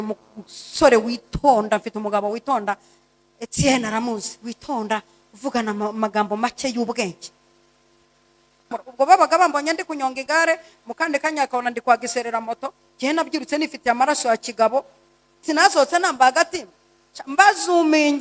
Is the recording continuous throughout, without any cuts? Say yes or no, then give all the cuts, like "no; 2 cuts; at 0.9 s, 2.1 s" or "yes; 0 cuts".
no; 2 cuts; at 8.8 s, 15.3 s